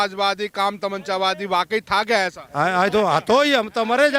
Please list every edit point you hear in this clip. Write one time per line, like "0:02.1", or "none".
none